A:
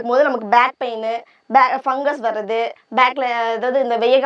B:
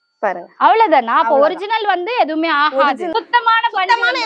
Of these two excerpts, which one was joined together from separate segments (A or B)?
B